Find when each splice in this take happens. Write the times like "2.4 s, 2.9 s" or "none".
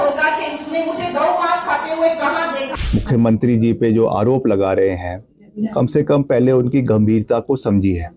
2.7 s